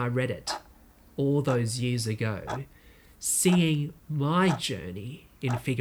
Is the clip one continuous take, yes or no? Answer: yes